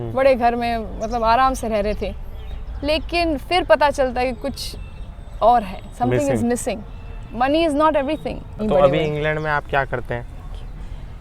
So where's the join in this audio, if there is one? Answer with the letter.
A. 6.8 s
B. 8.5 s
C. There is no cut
B